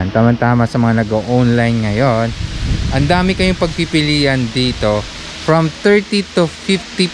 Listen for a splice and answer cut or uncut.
uncut